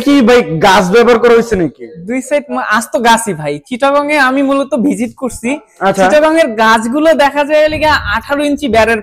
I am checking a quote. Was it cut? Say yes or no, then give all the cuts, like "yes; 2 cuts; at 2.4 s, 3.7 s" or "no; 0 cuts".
no; 0 cuts